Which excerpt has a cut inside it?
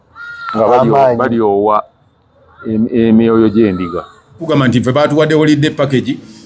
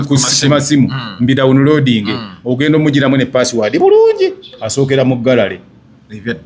first; 1 cut; at 4.4 s

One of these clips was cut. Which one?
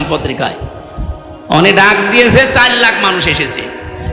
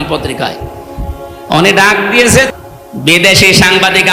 second; 1 cut; at 2.5 s

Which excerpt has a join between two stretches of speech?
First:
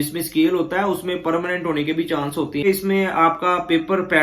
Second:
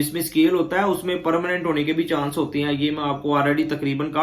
first; 1 cut; at 2.6 s

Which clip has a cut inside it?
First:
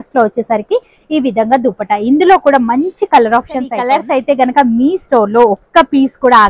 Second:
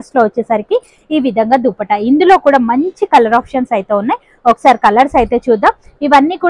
first; 1 cut; at 4.2 s

